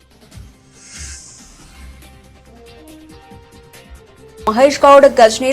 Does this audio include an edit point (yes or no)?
yes